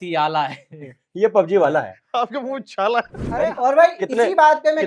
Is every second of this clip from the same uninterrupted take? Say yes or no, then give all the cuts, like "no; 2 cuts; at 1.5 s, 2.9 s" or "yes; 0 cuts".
no; 2 cuts; at 2.0 s, 3.1 s